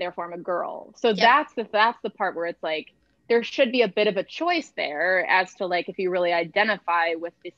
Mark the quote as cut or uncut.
uncut